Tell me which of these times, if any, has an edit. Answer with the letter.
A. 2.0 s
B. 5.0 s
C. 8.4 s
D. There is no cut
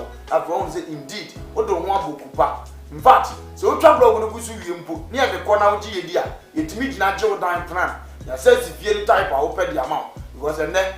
D